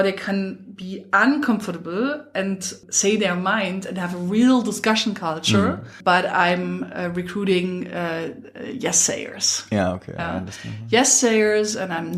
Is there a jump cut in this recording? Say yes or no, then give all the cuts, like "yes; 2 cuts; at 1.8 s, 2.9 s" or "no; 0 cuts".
yes; 2 cuts; at 2.8 s, 5.9 s